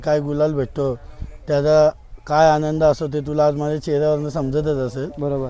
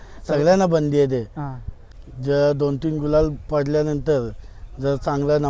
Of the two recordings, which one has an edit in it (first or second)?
second